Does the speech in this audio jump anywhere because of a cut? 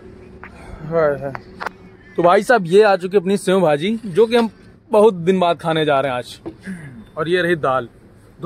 no; 0 cuts

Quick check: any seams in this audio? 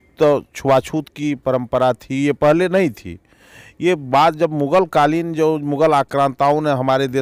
no; 0 cuts

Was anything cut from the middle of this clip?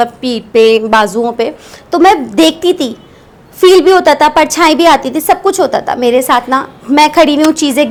no; 0 cuts

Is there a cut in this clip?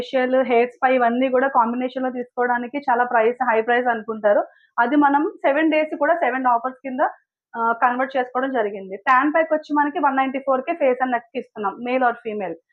no; 0 cuts

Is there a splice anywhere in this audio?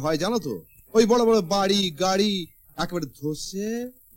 no; 0 cuts

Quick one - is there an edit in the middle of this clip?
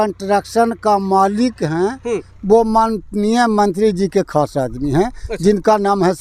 no; 0 cuts

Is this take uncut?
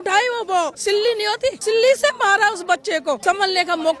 no; 2 cuts; at 1.1 s, 3.2 s

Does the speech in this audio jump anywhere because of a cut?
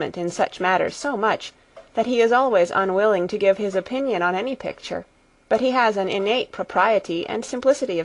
yes; 1 cut; at 1.9 s

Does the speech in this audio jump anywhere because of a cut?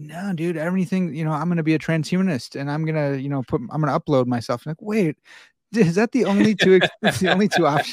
no; 0 cuts

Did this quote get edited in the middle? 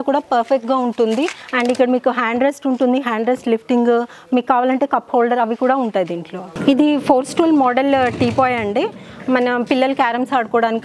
no; 0 cuts

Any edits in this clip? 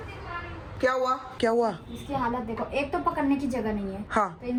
no; 0 cuts

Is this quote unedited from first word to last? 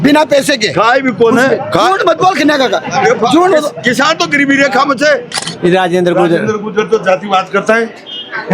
no; 1 cut; at 5.4 s

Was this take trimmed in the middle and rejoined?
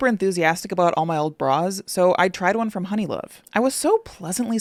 no; 0 cuts

